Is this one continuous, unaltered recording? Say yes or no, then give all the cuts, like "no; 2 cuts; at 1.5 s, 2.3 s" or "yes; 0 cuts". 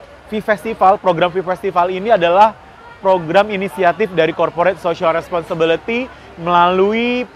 yes; 0 cuts